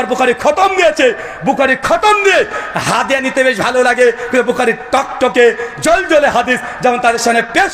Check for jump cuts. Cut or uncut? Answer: uncut